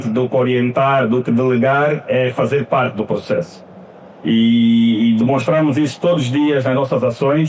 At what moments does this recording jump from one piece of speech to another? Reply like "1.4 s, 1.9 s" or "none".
none